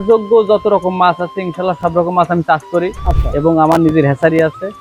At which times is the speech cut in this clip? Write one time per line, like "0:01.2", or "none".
none